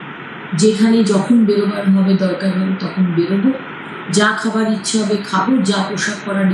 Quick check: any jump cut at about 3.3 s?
no; 0 cuts

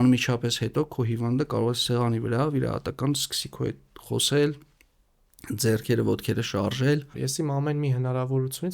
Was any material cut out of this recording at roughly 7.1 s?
yes; 1 cut; at 7.1 s

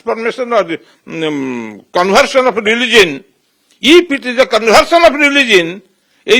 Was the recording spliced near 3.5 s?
no; 0 cuts

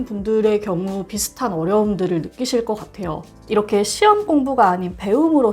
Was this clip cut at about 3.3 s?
yes; 1 cut; at 3.3 s

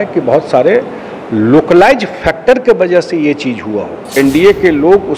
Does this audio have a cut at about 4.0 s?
yes; 1 cut; at 4.0 s

